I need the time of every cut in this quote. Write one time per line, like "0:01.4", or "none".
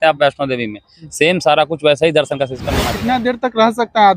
0:02.7